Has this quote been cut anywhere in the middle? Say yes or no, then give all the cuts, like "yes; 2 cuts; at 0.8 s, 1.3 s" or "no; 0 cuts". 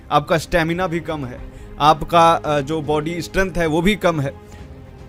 no; 0 cuts